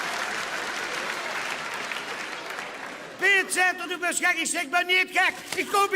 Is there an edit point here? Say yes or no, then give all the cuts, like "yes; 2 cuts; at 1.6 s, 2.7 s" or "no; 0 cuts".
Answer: no; 0 cuts